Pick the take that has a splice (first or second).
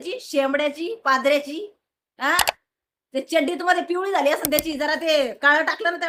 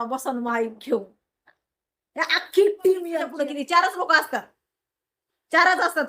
second